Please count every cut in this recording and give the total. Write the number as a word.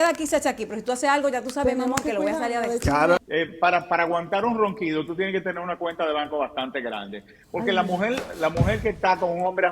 one